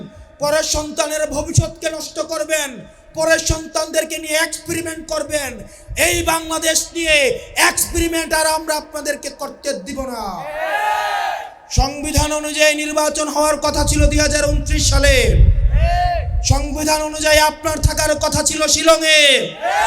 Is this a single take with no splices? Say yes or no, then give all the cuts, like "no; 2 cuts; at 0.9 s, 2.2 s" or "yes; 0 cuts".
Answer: no; 1 cut; at 11.6 s